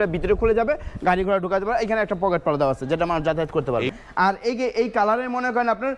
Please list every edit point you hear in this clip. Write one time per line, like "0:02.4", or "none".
0:03.9